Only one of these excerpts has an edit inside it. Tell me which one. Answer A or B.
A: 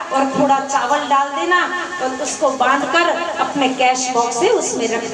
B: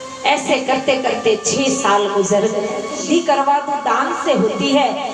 B